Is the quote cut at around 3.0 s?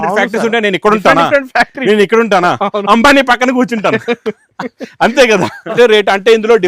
no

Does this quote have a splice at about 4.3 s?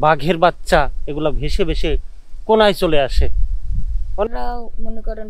yes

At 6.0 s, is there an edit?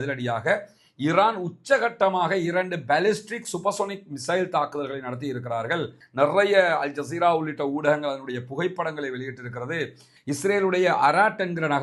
yes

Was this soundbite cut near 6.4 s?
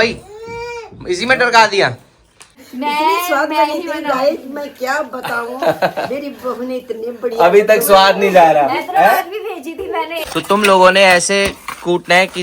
no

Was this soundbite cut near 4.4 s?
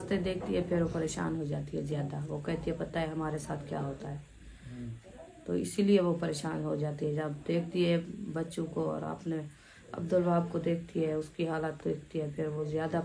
no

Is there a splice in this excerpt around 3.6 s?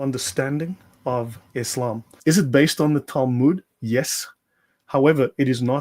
no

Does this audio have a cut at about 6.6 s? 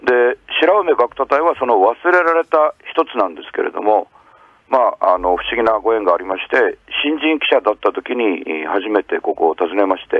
no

